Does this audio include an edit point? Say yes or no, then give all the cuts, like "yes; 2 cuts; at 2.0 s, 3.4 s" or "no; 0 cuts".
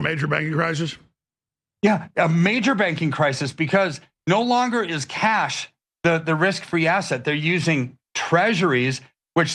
no; 0 cuts